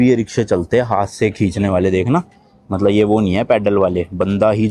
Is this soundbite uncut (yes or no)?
yes